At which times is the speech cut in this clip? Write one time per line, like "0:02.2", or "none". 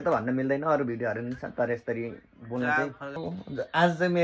0:03.2